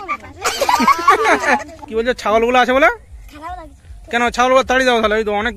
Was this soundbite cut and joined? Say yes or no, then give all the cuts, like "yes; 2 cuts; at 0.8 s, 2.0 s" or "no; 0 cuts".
yes; 1 cut; at 1.8 s